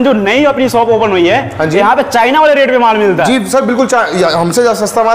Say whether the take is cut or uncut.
uncut